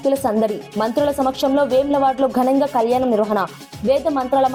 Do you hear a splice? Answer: no; 0 cuts

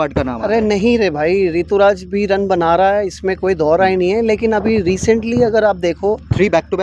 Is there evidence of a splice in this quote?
no; 0 cuts

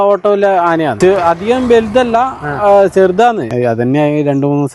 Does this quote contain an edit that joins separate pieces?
yes; 2 cuts; at 1.0 s, 3.5 s

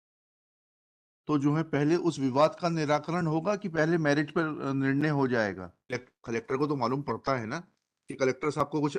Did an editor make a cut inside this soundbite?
yes; 1 cut; at 6.1 s

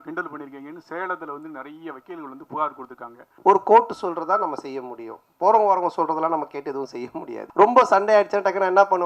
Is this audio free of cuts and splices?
no; 2 cuts; at 3.3 s, 7.4 s

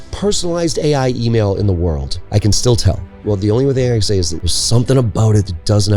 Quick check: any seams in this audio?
yes; 3 cuts; at 2.1 s, 3.2 s, 4.5 s

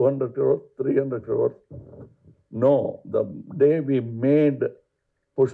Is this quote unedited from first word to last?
yes; 0 cuts

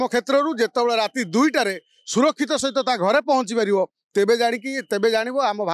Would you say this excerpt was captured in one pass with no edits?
yes; 0 cuts

